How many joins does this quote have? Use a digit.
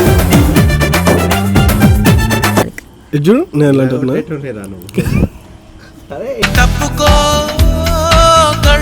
1